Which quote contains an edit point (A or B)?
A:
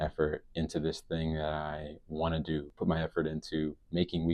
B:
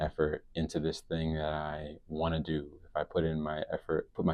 A